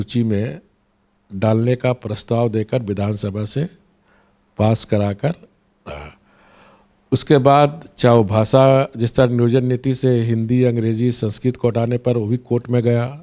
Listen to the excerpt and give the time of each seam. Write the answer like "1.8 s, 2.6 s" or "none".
none